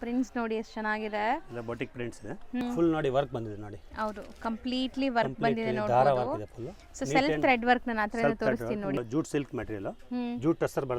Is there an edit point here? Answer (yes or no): yes